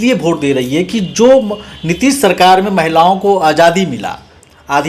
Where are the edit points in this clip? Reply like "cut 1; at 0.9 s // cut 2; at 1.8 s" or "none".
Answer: none